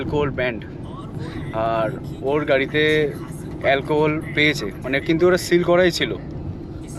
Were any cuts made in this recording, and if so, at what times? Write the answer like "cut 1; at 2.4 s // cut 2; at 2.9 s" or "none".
none